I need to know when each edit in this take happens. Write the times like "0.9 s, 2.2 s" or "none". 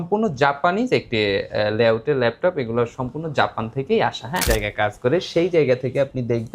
4.4 s